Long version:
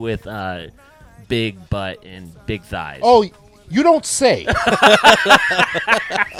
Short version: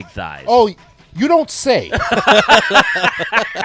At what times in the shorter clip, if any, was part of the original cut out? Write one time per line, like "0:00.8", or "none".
none